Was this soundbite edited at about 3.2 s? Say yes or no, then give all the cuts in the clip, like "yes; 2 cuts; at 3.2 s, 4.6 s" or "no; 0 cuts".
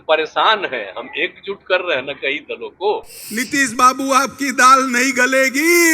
yes; 1 cut; at 3.2 s